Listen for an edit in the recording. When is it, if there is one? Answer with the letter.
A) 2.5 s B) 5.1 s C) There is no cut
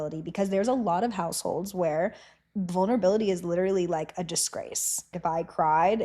B